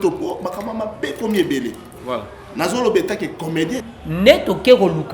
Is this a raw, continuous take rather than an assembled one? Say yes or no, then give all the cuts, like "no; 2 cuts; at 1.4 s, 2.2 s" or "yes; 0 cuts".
no; 1 cut; at 3.8 s